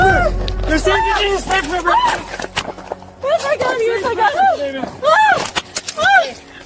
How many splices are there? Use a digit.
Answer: 1